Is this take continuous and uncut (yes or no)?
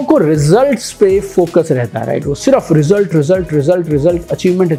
yes